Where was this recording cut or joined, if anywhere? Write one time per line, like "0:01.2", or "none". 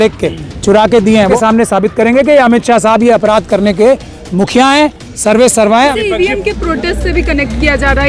0:01.3
0:05.9